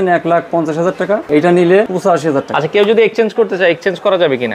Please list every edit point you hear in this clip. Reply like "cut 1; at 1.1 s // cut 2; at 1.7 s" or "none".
cut 1; at 1.2 s // cut 2; at 2.4 s